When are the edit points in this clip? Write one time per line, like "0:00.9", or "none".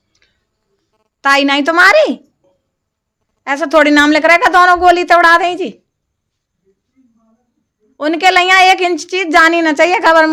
none